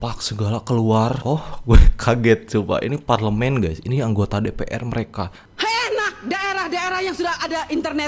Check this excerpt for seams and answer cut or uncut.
cut